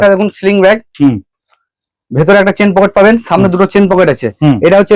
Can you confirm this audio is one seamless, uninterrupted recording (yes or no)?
yes